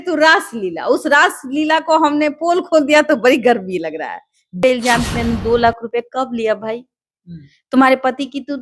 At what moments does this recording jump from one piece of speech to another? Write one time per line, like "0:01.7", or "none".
0:04.6